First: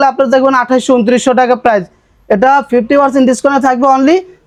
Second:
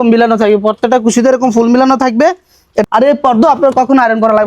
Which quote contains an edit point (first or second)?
second